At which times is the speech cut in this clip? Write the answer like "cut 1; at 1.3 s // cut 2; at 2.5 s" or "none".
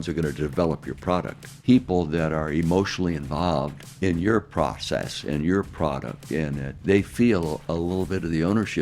cut 1; at 1.5 s // cut 2; at 3.8 s // cut 3; at 6.7 s